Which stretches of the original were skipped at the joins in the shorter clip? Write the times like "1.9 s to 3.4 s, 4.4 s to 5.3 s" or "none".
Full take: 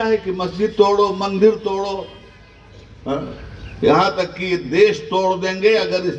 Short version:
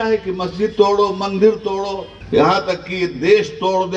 2.1 s to 3.6 s